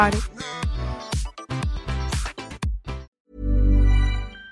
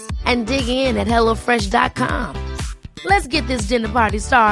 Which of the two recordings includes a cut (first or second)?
first